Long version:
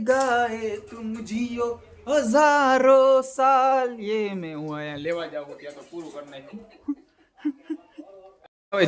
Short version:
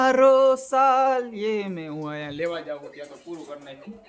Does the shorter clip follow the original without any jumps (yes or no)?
yes